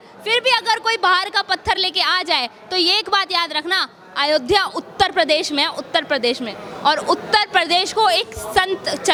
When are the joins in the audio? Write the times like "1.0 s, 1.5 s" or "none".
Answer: none